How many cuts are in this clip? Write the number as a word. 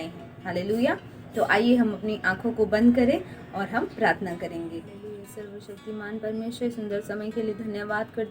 one